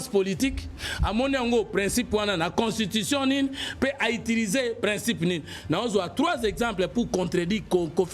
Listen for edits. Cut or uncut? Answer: uncut